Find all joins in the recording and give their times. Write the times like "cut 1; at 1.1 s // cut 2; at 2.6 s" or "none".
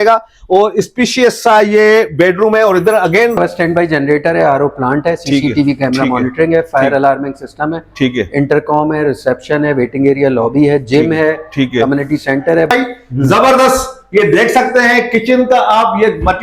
cut 1; at 3.4 s // cut 2; at 12.7 s